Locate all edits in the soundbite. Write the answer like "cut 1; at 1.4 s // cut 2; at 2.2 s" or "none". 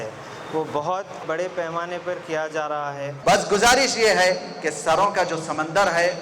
cut 1; at 1.2 s // cut 2; at 3.1 s